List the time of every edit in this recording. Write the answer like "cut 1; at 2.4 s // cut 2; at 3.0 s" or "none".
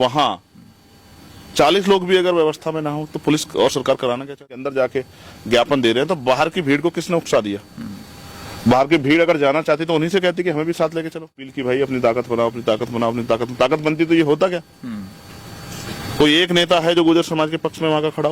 cut 1; at 4.6 s // cut 2; at 11.5 s